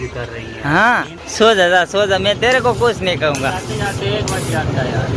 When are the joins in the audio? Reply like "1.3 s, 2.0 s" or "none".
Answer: 1.2 s